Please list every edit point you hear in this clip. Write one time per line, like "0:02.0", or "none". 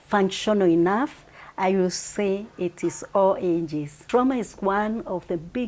0:03.9